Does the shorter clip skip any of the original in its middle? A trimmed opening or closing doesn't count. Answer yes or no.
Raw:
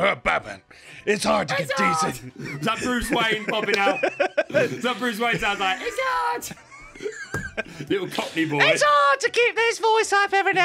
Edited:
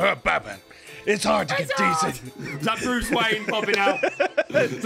no